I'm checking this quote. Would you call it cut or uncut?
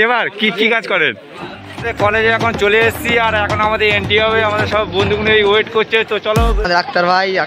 cut